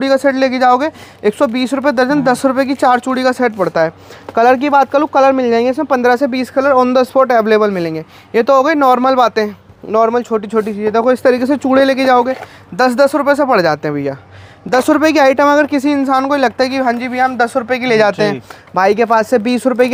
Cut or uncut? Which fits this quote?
uncut